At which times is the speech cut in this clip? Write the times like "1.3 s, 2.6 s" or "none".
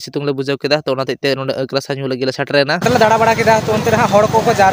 2.8 s